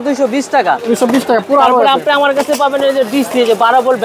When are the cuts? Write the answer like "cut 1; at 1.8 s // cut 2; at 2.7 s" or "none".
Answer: none